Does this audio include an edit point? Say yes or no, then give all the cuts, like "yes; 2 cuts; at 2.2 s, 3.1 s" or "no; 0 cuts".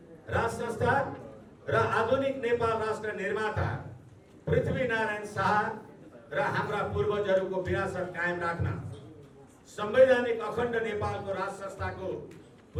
no; 0 cuts